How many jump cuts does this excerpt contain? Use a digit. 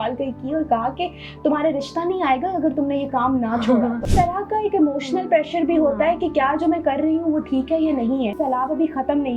2